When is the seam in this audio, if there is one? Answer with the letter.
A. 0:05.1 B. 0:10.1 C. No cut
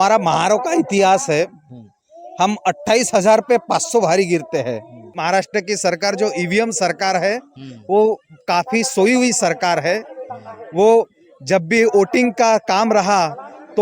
A